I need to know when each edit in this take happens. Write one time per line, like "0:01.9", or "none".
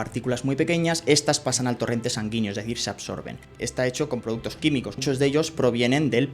0:03.4
0:05.0